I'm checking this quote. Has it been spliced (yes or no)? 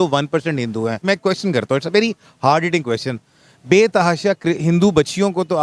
yes